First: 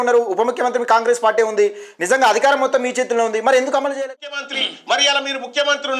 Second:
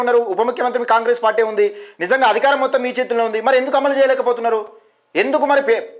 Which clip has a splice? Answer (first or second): first